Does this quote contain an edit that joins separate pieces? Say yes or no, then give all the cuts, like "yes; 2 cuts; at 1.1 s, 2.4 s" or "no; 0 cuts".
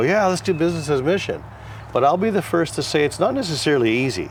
no; 0 cuts